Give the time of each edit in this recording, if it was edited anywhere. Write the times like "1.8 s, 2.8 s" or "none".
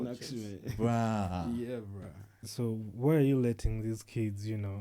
2.5 s